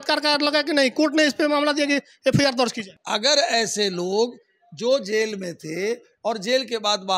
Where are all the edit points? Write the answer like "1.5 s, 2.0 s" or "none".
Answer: 2.9 s